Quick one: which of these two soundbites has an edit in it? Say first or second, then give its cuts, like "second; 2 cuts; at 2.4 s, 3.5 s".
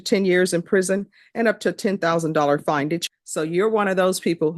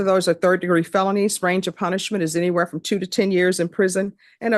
first; 1 cut; at 3.0 s